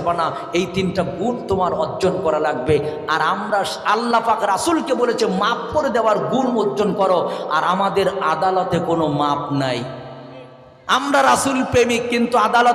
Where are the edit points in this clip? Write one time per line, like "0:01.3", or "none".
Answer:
none